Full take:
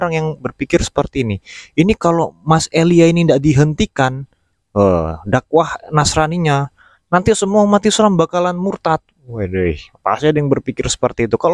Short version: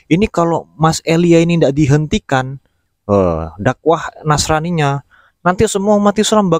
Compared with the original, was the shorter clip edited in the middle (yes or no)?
no